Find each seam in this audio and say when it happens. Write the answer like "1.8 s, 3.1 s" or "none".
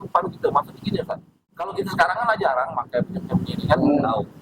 1.7 s